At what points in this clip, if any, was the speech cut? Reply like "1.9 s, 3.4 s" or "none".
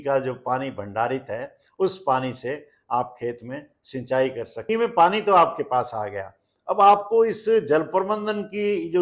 4.5 s